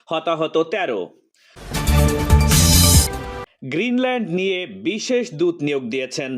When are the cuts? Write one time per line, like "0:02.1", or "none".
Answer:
0:01.6
0:03.5

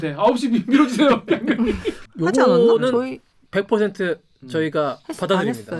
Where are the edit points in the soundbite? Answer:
0:02.0

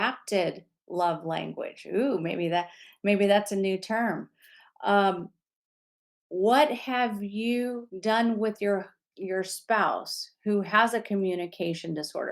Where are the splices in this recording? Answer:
0:07.9

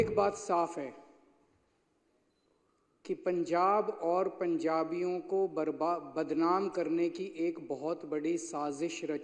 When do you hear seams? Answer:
none

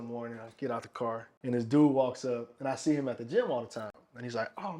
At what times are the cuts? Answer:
0:01.3

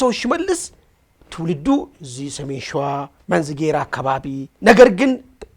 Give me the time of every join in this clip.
0:03.1
0:04.5

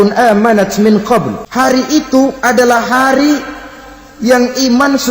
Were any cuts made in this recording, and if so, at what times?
0:01.4

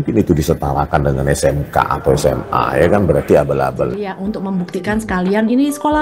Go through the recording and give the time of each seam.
0:04.1

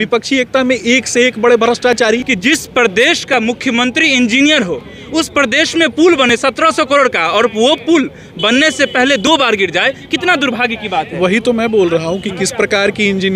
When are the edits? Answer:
0:02.3

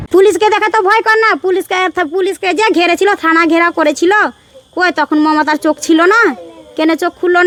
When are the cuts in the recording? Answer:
none

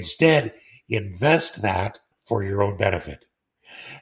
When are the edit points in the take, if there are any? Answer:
none

